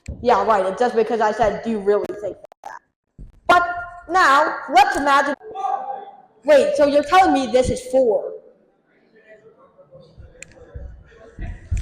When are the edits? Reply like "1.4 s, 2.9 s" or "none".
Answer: 5.3 s